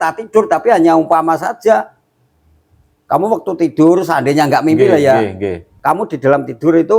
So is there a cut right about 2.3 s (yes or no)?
no